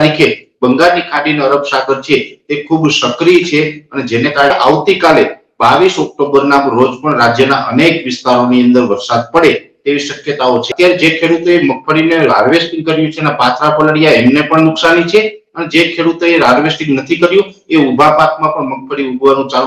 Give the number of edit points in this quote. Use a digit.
2